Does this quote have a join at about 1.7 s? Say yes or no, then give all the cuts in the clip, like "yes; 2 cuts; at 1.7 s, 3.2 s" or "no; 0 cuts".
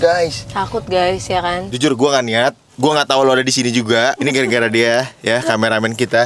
yes; 2 cuts; at 1.7 s, 4.2 s